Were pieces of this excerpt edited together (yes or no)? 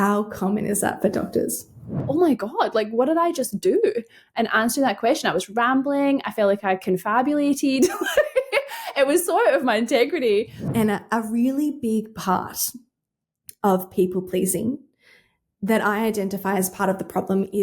yes